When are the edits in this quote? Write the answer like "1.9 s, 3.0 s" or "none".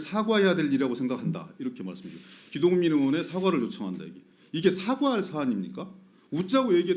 none